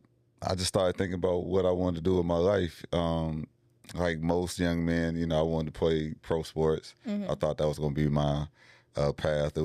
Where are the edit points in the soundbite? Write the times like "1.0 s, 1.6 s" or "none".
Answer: none